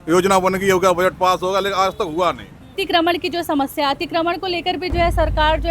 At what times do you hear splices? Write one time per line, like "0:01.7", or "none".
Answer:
0:02.8